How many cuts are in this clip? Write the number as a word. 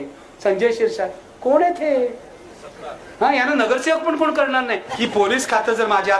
one